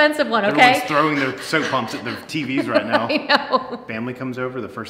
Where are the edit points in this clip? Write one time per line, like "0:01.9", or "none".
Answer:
0:03.8